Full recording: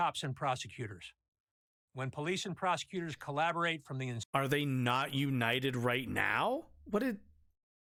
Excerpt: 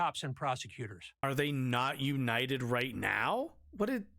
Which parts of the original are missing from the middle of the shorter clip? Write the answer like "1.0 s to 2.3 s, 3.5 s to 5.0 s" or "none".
1.2 s to 4.4 s